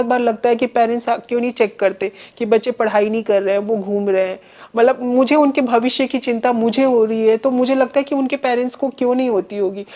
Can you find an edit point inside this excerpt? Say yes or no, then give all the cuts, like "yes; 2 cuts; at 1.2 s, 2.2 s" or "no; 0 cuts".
no; 0 cuts